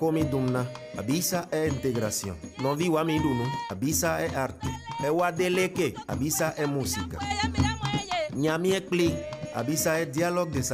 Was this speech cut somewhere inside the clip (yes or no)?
yes